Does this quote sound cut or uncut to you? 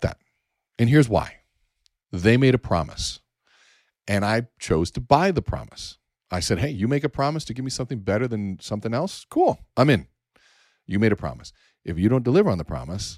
uncut